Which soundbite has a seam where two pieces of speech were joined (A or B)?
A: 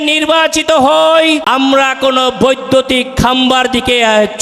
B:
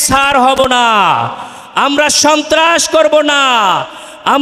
A